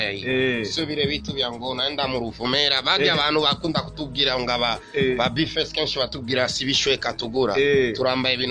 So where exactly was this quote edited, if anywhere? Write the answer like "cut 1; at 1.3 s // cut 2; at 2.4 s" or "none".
none

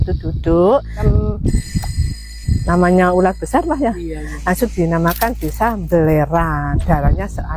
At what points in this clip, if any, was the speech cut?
cut 1; at 1.0 s

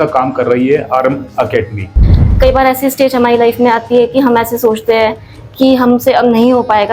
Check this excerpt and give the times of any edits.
cut 1; at 2.0 s

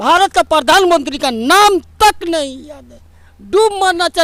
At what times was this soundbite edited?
none

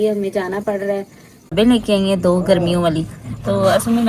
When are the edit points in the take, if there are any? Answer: cut 1; at 1.5 s

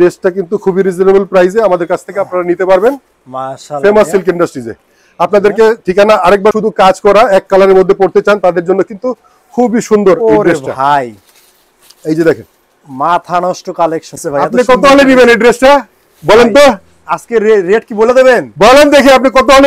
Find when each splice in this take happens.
cut 1; at 6.5 s // cut 2; at 14.2 s

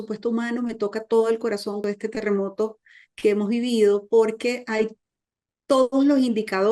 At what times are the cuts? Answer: cut 1; at 1.8 s

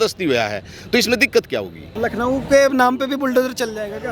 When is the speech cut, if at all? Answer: cut 1; at 1.8 s

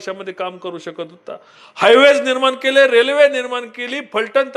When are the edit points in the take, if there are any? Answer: none

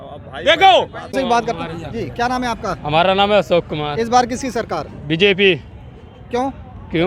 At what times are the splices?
cut 1; at 1.1 s

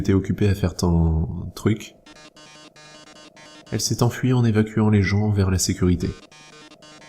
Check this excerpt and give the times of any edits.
cut 1; at 1.5 s

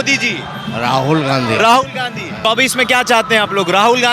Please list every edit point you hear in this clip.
cut 1; at 2.5 s

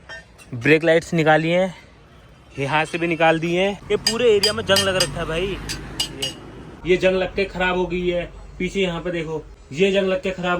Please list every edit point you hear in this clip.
cut 1; at 3.8 s // cut 2; at 6.7 s // cut 3; at 9.6 s

